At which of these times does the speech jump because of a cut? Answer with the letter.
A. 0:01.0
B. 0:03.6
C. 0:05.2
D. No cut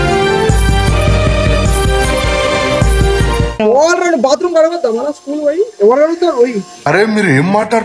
B